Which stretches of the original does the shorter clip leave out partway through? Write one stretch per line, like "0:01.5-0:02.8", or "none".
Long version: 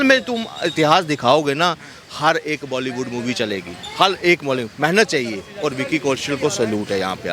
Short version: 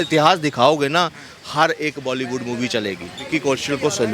0:03.9-0:05.8